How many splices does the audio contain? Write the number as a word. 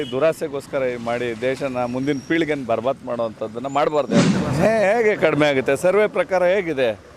one